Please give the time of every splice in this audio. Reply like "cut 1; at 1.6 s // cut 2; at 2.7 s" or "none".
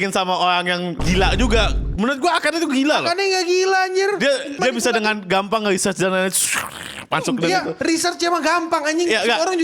cut 1; at 1.0 s // cut 2; at 4.6 s